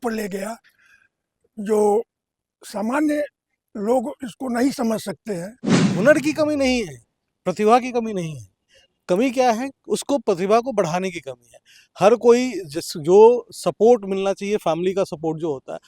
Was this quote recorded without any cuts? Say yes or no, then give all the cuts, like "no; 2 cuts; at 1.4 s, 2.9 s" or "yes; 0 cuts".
no; 1 cut; at 5.8 s